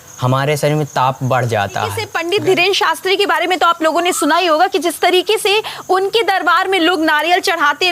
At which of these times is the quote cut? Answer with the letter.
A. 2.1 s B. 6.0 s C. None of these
A